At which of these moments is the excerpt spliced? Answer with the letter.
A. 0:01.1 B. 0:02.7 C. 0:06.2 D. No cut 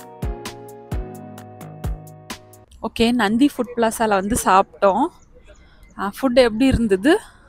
B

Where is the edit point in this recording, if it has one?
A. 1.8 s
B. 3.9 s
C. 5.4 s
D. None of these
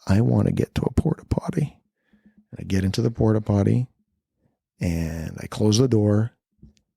A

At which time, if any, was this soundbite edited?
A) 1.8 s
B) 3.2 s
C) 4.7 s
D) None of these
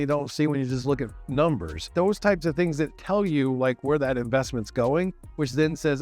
A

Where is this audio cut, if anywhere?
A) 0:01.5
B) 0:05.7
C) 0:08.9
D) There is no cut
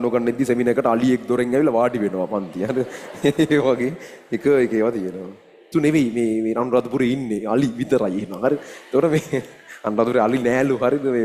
B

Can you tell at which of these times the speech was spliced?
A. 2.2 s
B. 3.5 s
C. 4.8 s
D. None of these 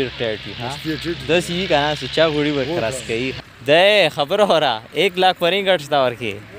B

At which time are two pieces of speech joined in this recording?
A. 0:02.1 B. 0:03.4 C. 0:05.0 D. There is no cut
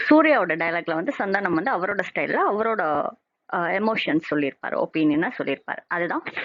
A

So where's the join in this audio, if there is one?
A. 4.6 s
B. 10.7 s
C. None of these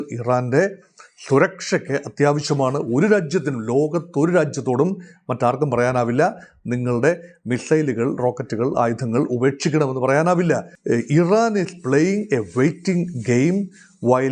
B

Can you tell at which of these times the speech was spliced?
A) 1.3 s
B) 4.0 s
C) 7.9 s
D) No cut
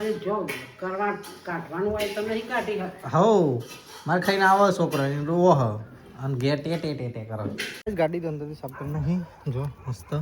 C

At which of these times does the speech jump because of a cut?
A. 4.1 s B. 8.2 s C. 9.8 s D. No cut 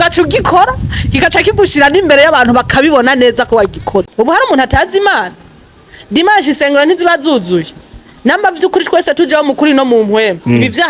A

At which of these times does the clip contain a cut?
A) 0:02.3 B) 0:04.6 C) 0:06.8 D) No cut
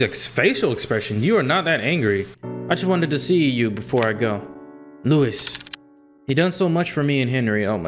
A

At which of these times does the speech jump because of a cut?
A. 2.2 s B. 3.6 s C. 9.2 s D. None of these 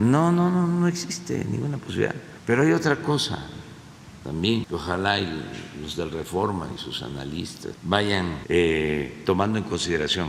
A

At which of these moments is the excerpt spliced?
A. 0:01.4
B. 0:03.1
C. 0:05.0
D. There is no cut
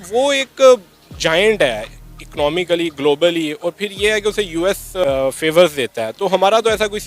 C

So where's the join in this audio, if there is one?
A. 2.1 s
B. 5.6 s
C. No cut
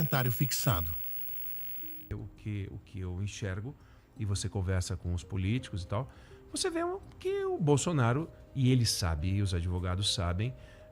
A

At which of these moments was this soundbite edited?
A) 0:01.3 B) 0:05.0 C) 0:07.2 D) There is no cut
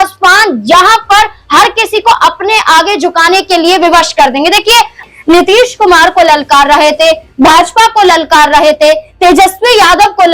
B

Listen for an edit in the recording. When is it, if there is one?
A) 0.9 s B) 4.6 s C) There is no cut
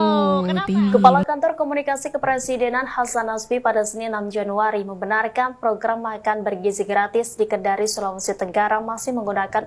A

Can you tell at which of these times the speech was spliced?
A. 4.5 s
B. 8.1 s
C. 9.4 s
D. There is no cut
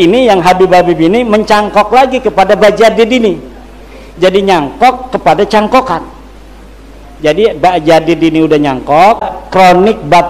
C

